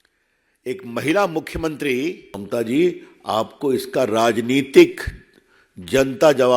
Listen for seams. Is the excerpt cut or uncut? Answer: cut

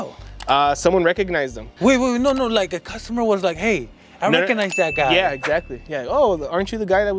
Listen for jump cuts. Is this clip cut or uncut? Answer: cut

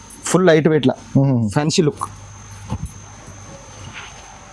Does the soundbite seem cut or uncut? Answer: uncut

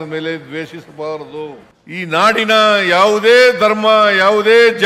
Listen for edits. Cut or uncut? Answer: cut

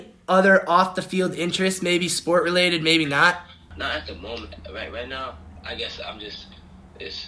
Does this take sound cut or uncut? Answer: cut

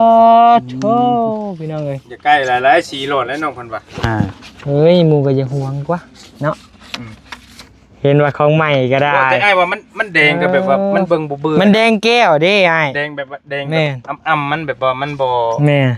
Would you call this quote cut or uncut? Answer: uncut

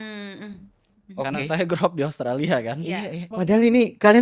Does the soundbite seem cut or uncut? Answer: cut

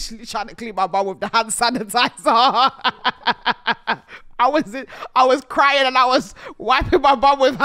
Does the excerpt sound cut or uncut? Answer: uncut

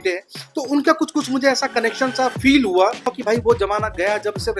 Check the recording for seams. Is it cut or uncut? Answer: cut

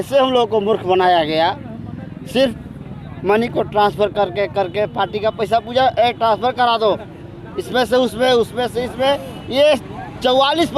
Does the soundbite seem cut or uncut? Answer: uncut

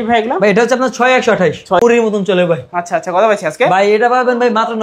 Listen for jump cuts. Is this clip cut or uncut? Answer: cut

